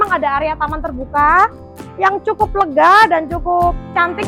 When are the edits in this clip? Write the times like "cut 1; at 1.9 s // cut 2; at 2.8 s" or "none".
none